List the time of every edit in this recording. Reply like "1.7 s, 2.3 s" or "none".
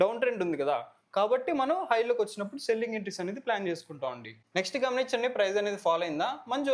none